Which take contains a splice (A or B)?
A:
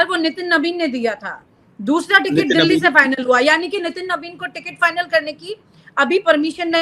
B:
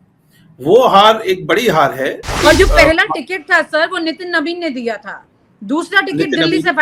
B